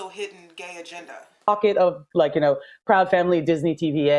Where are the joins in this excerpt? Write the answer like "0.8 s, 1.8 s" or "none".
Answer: 1.5 s